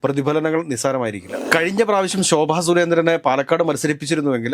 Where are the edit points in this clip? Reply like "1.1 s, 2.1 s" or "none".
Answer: 1.4 s

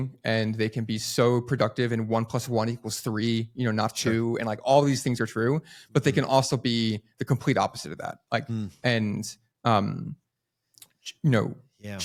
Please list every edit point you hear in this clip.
none

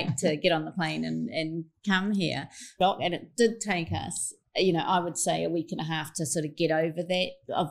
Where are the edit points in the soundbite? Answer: 2.7 s

